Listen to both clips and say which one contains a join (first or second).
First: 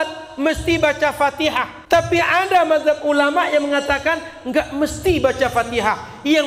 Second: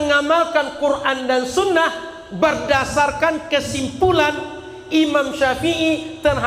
first